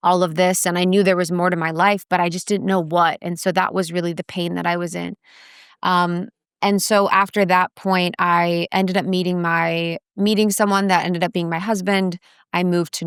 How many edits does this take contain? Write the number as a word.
zero